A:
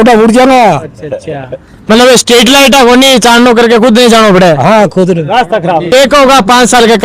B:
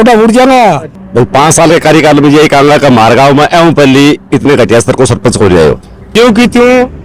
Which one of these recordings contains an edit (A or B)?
B